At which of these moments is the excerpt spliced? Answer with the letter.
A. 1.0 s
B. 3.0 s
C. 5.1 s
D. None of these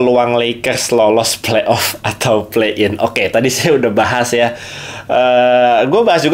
D